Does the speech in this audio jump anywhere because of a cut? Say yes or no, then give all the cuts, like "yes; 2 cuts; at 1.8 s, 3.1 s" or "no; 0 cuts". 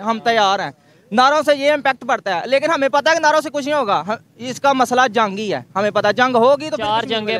no; 0 cuts